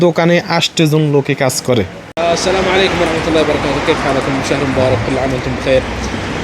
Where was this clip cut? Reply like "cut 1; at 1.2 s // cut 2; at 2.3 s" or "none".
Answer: cut 1; at 2.1 s